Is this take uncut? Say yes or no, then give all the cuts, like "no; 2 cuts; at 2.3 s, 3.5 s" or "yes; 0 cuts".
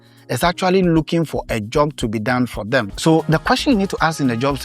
no; 1 cut; at 2.9 s